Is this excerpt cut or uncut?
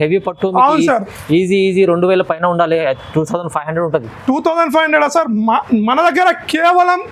uncut